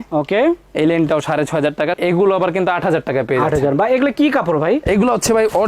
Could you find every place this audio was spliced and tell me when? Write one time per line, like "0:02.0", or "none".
0:02.0